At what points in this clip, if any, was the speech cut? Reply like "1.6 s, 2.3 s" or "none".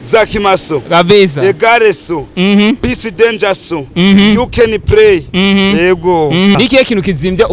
6.6 s